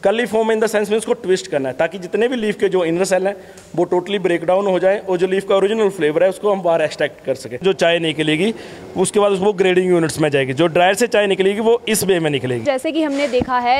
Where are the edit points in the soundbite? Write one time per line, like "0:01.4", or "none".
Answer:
0:07.6
0:12.6